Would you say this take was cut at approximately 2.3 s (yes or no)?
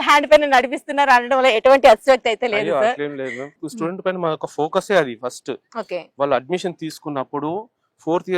no